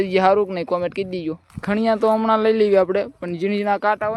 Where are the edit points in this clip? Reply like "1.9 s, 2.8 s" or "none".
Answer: 1.4 s